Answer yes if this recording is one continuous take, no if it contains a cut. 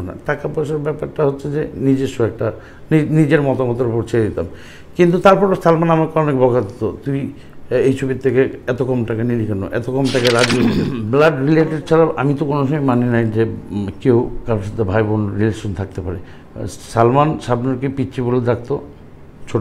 no